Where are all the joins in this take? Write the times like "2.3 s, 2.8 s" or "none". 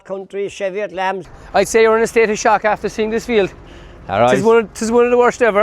1.3 s